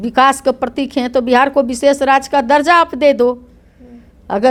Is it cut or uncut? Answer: uncut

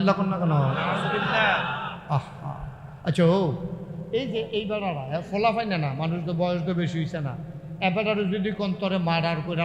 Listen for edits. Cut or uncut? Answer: uncut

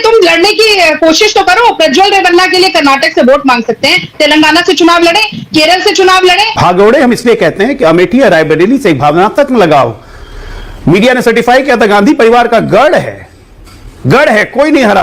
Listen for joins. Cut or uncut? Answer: cut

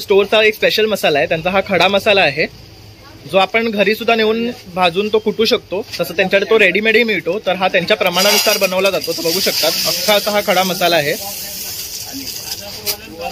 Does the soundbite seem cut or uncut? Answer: uncut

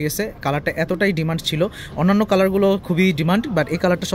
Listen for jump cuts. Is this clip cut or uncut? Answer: uncut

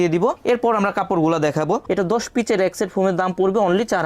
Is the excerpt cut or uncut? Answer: cut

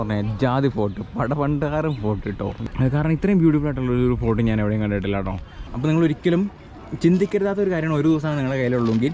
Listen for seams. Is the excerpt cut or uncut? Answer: cut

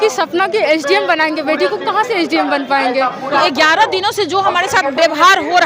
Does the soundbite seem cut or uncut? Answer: cut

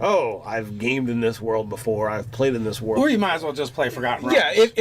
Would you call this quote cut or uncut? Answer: cut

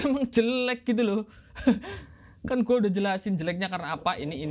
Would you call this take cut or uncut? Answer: uncut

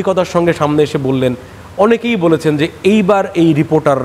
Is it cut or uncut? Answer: uncut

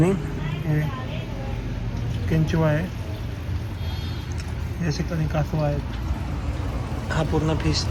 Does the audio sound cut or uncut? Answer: uncut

